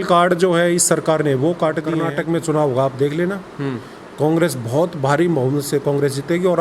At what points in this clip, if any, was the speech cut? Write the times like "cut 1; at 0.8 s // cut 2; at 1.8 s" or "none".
cut 1; at 2.1 s